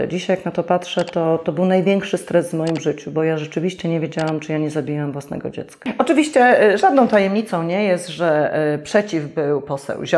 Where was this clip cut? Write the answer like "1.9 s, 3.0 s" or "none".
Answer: 5.8 s